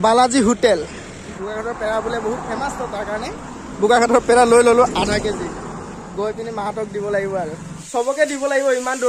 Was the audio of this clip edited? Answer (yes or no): yes